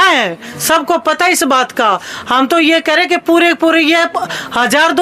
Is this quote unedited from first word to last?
yes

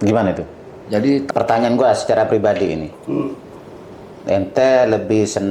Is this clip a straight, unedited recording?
no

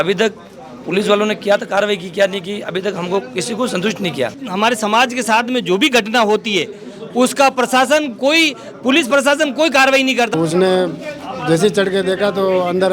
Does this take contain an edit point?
yes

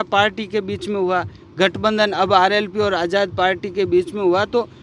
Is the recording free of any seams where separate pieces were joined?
yes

